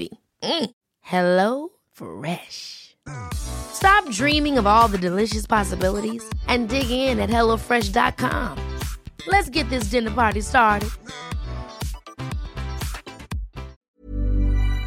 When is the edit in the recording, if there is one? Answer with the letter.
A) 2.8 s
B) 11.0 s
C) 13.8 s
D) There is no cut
C